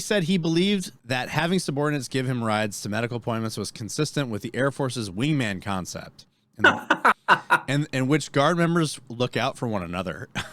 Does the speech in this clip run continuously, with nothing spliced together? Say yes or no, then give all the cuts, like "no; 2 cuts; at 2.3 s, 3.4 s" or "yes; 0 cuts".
no; 1 cut; at 1.0 s